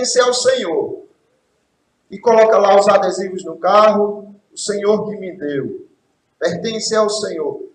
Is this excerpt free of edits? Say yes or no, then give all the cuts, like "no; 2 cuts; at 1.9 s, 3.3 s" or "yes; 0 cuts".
yes; 0 cuts